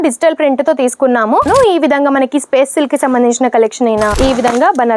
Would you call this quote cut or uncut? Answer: cut